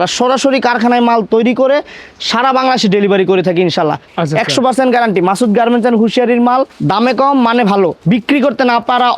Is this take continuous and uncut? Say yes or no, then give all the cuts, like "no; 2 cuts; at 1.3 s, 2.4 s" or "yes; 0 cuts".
no; 3 cuts; at 4.1 s, 6.8 s, 8.0 s